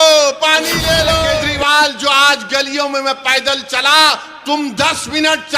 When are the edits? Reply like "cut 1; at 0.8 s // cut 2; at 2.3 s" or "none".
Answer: cut 1; at 1.4 s

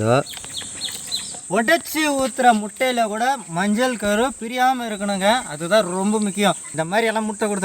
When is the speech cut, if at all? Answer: cut 1; at 6.7 s

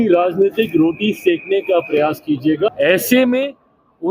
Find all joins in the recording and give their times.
cut 1; at 2.7 s

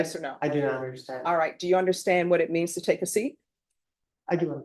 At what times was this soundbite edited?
none

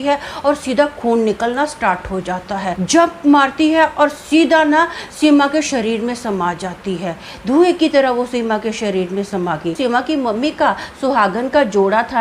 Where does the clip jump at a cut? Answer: cut 1; at 2.8 s // cut 2; at 9.8 s

